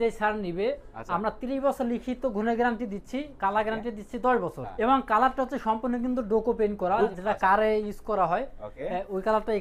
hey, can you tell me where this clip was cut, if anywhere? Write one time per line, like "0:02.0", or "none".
0:04.7
0:07.1